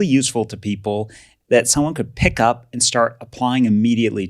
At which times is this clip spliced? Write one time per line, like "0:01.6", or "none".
0:01.3